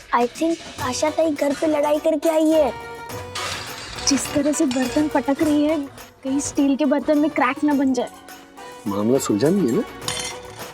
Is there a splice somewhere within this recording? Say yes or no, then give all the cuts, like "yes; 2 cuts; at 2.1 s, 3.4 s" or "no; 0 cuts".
no; 0 cuts